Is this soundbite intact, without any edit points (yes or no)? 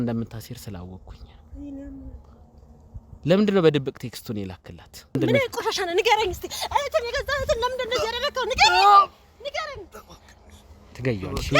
no